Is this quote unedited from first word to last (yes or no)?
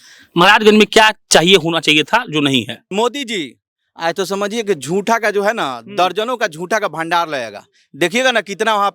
no